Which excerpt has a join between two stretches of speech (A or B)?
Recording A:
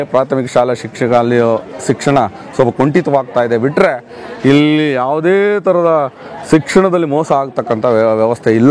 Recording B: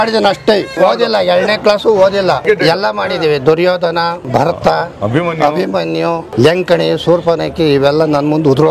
B